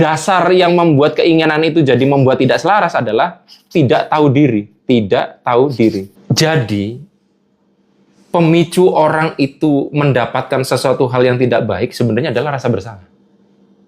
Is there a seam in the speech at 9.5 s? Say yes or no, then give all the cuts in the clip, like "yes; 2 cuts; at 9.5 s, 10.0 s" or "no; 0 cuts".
no; 1 cut; at 6.1 s